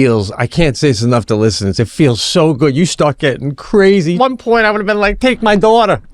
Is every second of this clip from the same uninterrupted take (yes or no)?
no